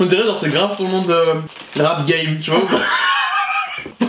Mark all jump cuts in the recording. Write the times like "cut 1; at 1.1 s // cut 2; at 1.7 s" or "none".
cut 1; at 1.6 s